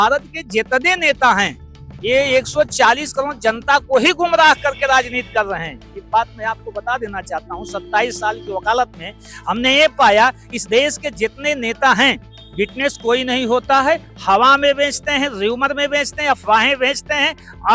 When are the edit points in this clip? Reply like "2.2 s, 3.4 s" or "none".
none